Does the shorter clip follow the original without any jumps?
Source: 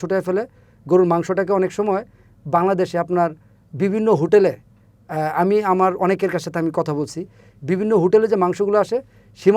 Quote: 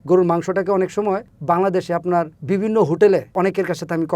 no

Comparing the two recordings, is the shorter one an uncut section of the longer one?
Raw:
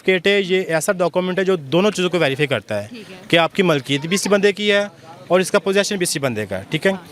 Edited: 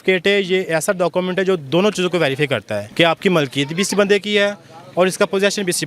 no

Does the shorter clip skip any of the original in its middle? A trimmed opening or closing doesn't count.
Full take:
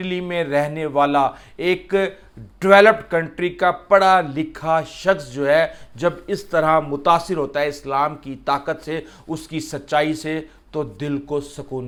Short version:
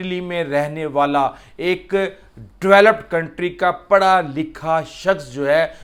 no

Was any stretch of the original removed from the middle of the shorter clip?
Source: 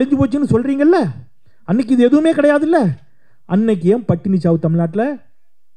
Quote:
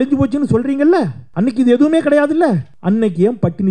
yes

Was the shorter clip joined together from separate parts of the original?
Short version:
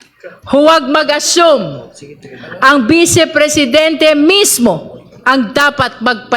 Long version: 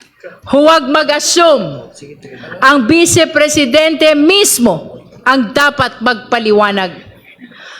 no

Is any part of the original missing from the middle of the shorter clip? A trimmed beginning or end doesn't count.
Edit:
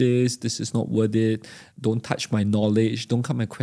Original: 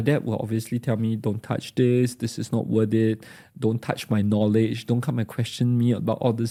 no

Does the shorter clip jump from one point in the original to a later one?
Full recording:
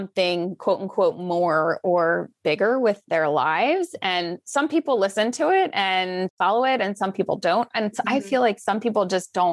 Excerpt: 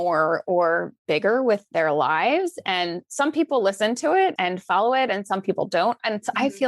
yes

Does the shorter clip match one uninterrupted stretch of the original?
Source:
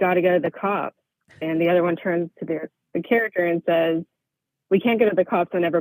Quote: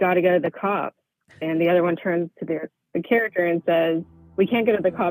no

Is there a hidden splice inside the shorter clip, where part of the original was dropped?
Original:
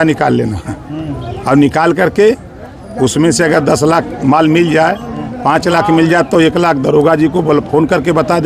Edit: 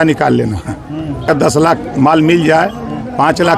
yes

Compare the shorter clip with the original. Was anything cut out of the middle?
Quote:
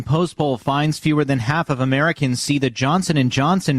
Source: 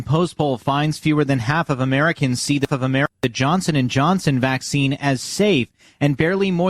yes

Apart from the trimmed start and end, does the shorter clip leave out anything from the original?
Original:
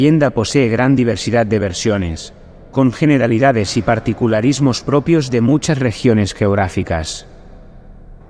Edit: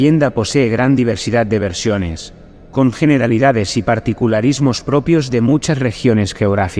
no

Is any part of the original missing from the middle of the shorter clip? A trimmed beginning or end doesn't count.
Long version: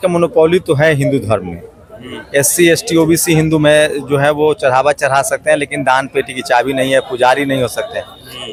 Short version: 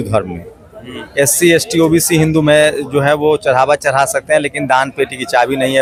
no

